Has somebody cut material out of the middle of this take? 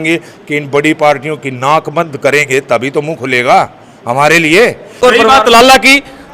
yes; 1 cut; at 5.0 s

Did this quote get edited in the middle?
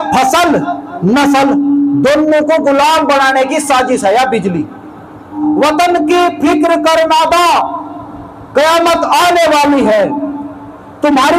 yes; 1 cut; at 5.4 s

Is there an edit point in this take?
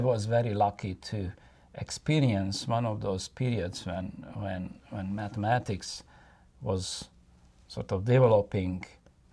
no; 0 cuts

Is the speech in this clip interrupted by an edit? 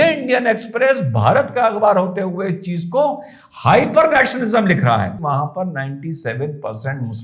yes; 1 cut; at 5.1 s

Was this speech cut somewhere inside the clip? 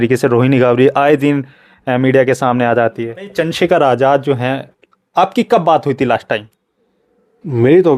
yes; 1 cut; at 3.2 s

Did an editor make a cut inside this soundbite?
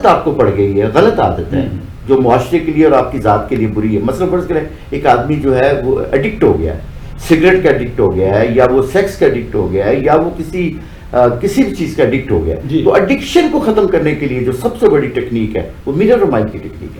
no; 0 cuts

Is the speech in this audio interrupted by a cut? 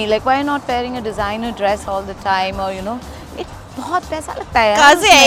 no; 0 cuts

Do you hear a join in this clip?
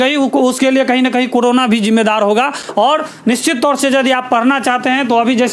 no; 0 cuts

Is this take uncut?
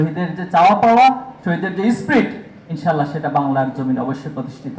yes; 0 cuts

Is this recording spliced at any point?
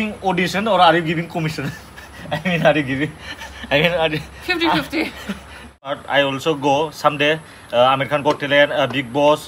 yes; 1 cut; at 5.9 s

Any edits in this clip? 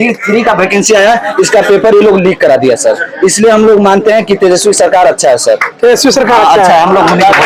no; 0 cuts

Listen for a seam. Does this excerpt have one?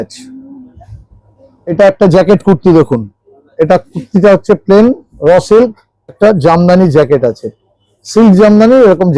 yes; 2 cuts; at 1.7 s, 6.2 s

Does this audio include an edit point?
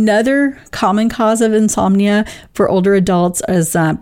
no; 0 cuts

